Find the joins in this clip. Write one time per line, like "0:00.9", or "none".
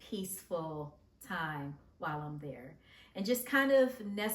none